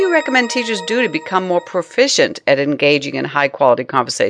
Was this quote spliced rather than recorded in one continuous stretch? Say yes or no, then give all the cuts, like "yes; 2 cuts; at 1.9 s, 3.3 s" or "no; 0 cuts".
no; 0 cuts